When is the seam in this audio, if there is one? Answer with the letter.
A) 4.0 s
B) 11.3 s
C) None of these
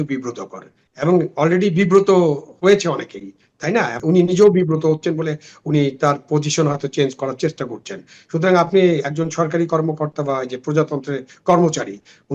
A